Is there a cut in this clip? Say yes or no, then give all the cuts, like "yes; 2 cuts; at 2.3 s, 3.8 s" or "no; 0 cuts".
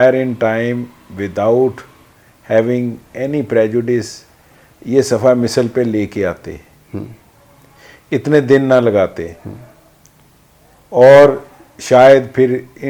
no; 0 cuts